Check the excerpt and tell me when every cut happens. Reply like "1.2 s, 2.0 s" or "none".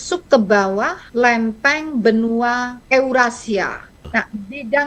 1.0 s, 2.7 s, 4.0 s